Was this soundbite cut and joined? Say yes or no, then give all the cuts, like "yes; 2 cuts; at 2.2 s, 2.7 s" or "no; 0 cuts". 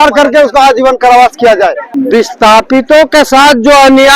no; 0 cuts